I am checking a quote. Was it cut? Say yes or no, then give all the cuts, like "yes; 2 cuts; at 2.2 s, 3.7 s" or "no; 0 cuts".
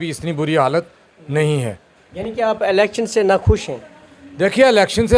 no; 0 cuts